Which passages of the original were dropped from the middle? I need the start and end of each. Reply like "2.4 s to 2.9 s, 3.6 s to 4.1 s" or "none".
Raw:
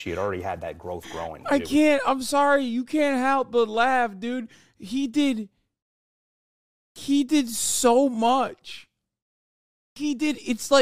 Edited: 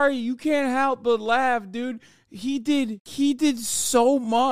5.5 s to 6.9 s